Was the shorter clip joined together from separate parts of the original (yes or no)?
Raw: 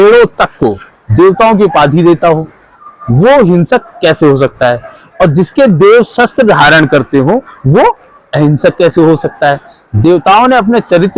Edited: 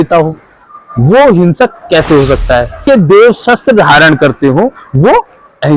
yes